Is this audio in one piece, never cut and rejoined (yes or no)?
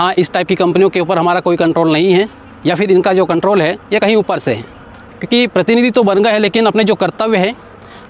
no